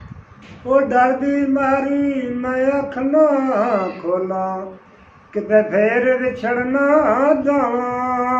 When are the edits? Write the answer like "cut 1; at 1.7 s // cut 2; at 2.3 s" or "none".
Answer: none